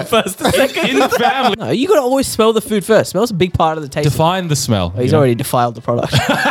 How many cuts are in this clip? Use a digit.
1